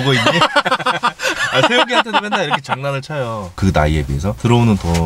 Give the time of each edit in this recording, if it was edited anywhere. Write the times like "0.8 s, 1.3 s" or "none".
3.5 s